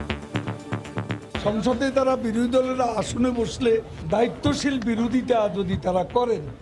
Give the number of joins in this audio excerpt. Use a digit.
2